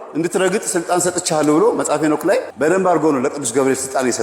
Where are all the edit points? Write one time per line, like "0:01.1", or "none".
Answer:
0:02.5

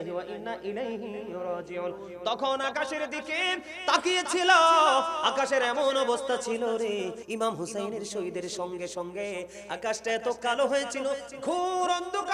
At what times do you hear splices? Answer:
0:07.2

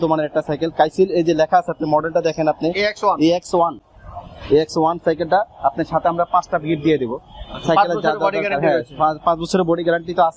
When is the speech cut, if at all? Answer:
none

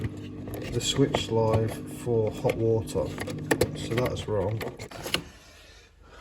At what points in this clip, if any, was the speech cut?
0:04.9

